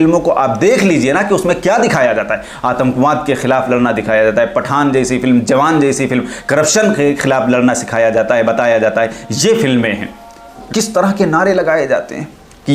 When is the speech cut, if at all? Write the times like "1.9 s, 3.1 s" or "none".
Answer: 10.6 s